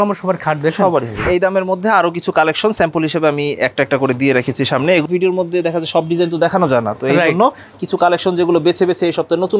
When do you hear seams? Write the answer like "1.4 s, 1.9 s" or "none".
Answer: 1.3 s, 5.0 s